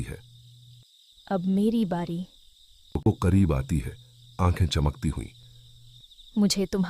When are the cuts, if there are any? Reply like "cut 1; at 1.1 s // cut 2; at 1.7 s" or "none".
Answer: cut 1; at 3.1 s